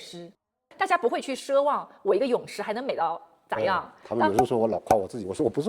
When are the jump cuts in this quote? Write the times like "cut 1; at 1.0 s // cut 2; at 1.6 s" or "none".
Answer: cut 1; at 4.1 s